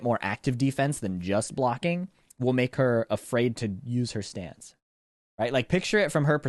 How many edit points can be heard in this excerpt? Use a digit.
0